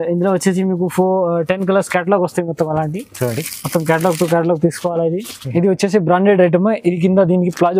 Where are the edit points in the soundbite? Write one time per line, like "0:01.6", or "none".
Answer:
0:05.4